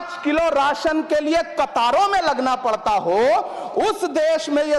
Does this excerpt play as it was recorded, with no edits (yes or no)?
yes